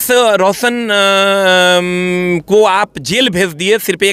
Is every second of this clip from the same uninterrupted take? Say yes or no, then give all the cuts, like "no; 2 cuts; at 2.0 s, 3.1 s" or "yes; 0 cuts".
yes; 0 cuts